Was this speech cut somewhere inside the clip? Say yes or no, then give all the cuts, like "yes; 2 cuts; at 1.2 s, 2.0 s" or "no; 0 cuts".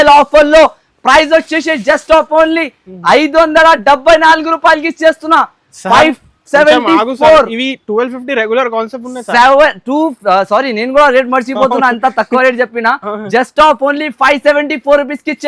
no; 0 cuts